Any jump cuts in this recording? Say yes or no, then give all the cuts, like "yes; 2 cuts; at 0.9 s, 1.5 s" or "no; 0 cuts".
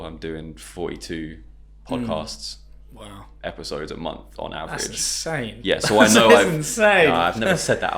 no; 0 cuts